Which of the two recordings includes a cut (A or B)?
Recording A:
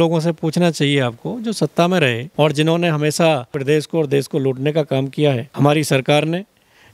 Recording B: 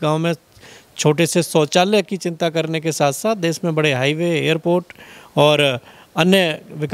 A